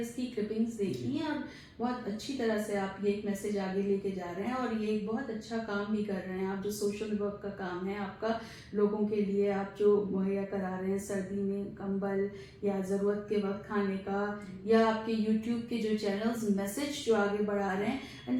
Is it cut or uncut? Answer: uncut